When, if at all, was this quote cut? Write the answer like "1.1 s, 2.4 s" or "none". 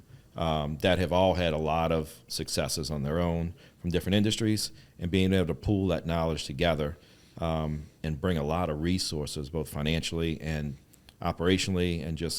none